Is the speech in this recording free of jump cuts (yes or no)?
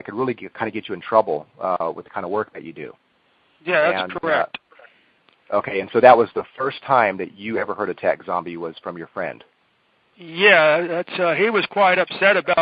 yes